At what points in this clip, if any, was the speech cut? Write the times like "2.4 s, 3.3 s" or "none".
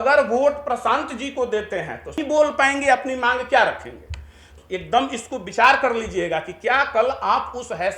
2.2 s, 4.4 s